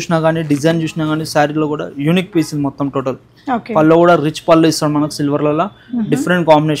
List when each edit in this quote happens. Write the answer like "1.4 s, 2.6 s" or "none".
none